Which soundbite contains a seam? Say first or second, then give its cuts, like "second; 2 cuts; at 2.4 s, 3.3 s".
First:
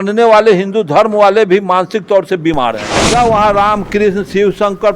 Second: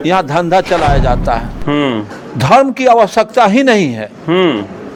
first; 1 cut; at 2.9 s